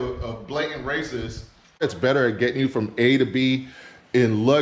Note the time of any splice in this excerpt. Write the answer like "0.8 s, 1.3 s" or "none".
1.8 s

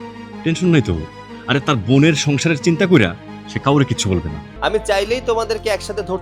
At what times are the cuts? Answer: 4.5 s

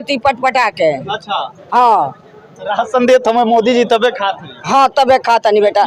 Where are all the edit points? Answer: none

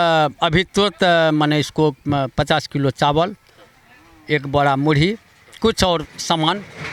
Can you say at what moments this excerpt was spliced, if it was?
none

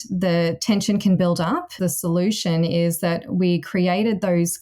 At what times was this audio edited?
1.7 s

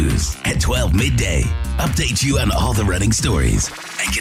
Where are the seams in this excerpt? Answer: none

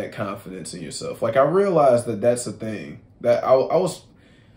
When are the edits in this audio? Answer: none

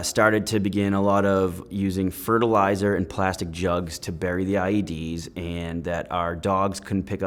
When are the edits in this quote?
none

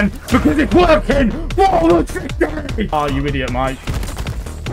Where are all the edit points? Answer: 2.9 s

